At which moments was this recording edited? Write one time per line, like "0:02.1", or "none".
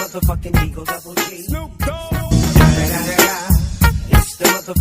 0:01.0
0:02.0